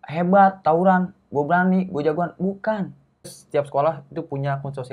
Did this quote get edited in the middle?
yes; 1 cut; at 3.4 s

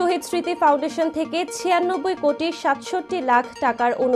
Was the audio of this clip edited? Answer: no; 0 cuts

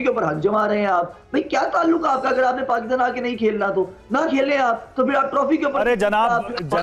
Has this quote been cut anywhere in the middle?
no; 0 cuts

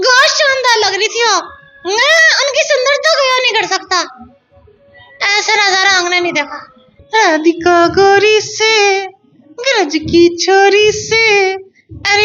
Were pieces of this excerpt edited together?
yes; 1 cut; at 6.9 s

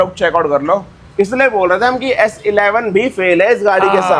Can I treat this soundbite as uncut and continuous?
yes; 0 cuts

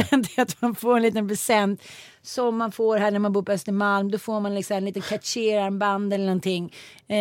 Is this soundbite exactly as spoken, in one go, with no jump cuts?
yes; 0 cuts

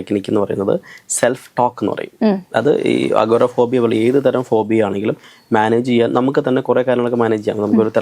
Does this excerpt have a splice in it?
no; 0 cuts

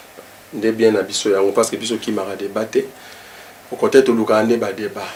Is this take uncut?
yes; 0 cuts

